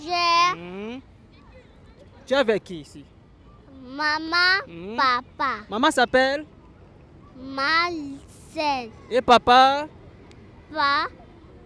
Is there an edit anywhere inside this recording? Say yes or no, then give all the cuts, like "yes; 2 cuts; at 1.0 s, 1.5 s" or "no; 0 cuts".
no; 0 cuts